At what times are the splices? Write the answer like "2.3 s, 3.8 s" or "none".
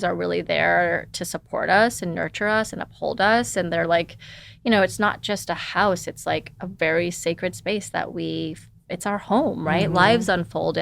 none